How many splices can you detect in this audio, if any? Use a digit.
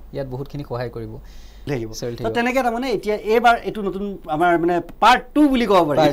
1